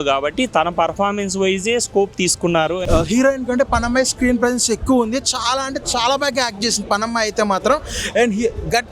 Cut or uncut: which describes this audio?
cut